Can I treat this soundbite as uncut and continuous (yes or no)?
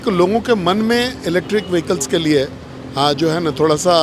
yes